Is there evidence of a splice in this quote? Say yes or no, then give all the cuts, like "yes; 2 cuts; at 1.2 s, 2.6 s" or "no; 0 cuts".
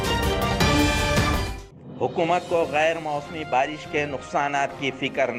no; 0 cuts